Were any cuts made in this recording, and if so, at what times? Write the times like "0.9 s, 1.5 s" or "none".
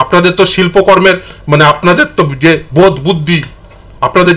none